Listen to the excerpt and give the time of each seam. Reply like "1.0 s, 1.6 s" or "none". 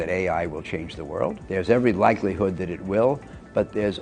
1.4 s

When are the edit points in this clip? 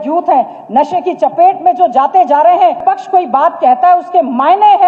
2.8 s

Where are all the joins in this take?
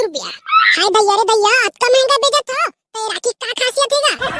none

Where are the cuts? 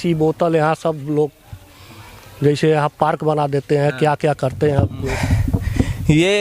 5.0 s

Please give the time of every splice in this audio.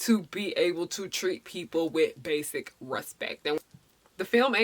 3.6 s

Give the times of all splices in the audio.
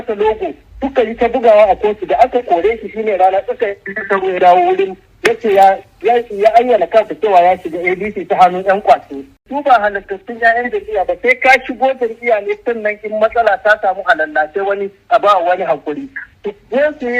9.4 s

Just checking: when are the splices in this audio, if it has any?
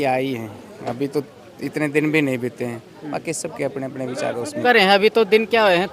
4.6 s

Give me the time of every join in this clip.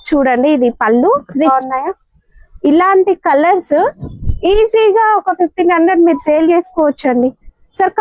1.5 s

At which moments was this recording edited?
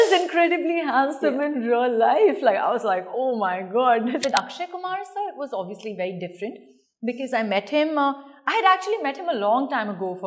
4.2 s

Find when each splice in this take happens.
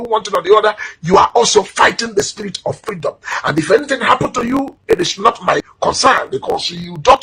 5.2 s

